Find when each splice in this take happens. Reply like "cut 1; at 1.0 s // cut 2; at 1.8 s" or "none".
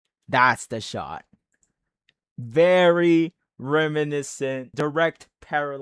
cut 1; at 4.7 s